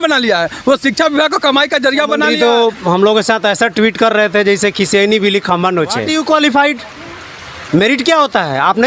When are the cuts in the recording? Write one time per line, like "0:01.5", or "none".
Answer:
0:02.3
0:06.1